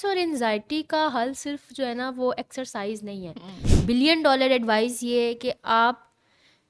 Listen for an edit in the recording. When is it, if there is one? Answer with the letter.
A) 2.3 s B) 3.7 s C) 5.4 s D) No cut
B